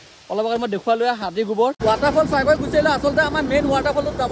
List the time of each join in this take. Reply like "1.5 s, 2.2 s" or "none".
1.8 s